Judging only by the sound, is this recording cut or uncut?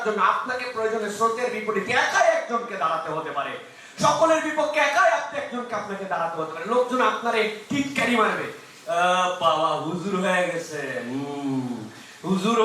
uncut